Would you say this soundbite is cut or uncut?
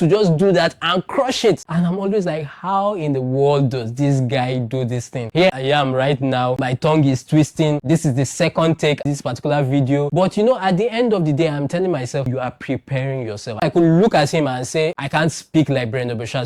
cut